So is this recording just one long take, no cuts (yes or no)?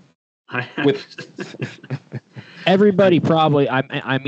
yes